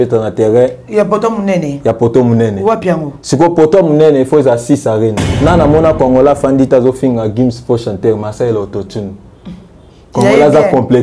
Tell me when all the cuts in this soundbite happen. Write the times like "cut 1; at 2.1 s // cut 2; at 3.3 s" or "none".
cut 1; at 5.3 s

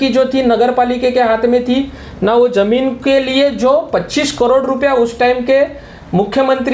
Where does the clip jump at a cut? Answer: none

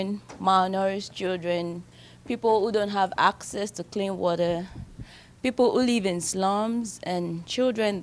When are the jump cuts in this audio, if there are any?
none

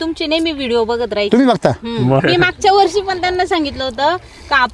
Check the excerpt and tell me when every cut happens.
cut 1; at 2.2 s

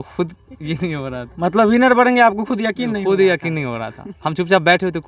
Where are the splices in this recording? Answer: none

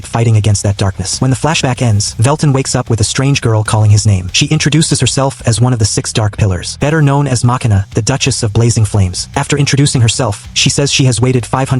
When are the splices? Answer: cut 1; at 1.0 s // cut 2; at 2.1 s // cut 3; at 4.3 s // cut 4; at 6.7 s // cut 5; at 7.8 s // cut 6; at 9.2 s // cut 7; at 10.5 s

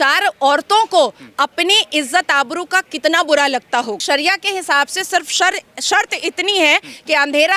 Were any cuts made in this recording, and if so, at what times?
cut 1; at 4.0 s

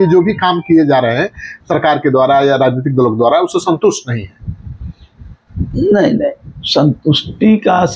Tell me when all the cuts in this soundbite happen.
none

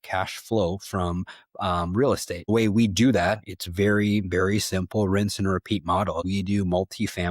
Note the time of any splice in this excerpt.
cut 1; at 2.5 s // cut 2; at 6.2 s

